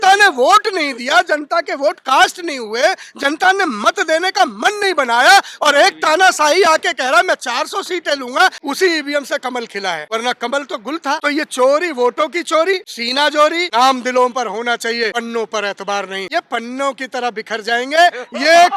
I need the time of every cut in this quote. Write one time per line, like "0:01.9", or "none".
0:08.6
0:10.0
0:11.2
0:13.2
0:15.1
0:16.2